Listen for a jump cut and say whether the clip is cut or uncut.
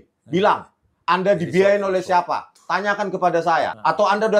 uncut